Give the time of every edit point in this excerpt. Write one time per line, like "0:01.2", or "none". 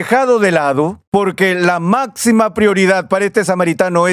0:01.0